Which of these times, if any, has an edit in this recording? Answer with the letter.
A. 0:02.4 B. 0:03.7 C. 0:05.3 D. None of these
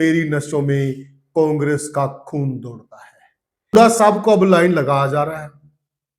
B